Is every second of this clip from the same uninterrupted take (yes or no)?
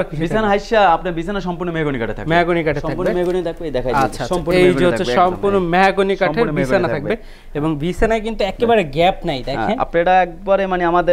yes